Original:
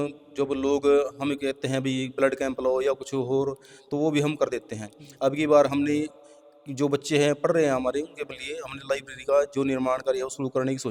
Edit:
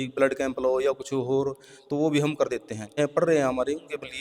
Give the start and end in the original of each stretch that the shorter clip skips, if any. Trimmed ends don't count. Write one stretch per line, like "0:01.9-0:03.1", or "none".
0:05.0-0:07.3